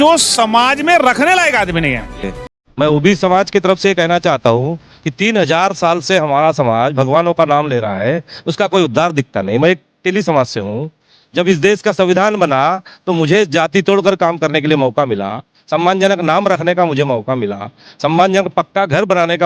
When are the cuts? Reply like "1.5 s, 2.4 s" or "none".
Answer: 2.2 s